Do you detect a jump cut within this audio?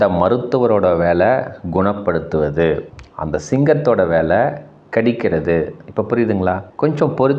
no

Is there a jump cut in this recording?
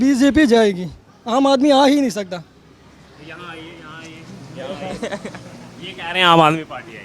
no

